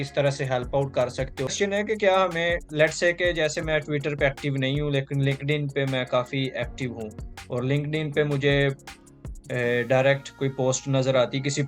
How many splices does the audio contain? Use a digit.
1